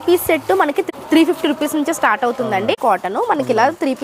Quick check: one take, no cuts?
no; 2 cuts; at 1.0 s, 2.7 s

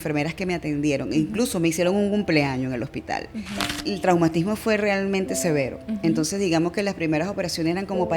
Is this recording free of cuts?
no; 1 cut; at 3.7 s

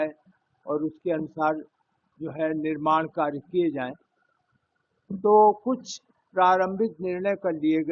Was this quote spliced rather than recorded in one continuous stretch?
no; 0 cuts

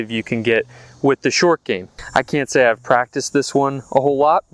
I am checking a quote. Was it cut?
yes; 1 cut; at 1.9 s

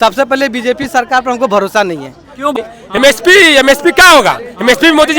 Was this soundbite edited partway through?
yes; 1 cut; at 2.6 s

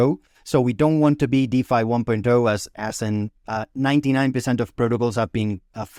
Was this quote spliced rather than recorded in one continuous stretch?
no; 0 cuts

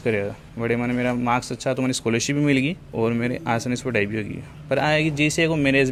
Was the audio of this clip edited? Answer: no; 0 cuts

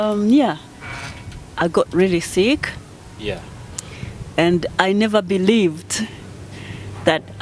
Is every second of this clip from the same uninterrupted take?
yes; 0 cuts

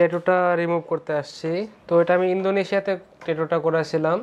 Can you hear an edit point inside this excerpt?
no; 0 cuts

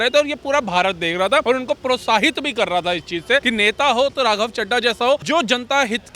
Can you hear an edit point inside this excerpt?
yes; 3 cuts; at 1.4 s, 3.4 s, 5.2 s

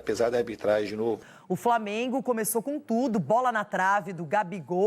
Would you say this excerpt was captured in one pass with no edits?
no; 1 cut; at 1.3 s

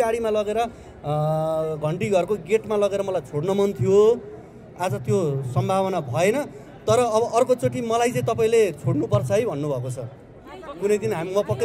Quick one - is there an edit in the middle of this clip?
no; 0 cuts

